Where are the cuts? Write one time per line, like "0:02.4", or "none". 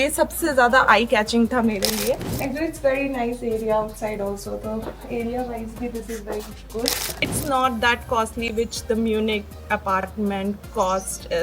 0:02.3
0:07.4